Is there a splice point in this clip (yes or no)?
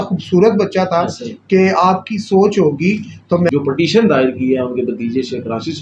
yes